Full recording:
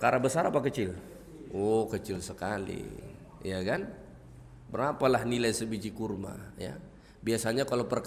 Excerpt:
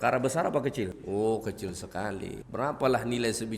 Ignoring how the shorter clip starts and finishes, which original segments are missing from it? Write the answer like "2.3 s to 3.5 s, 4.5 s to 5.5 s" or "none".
1.0 s to 1.4 s, 2.8 s to 4.6 s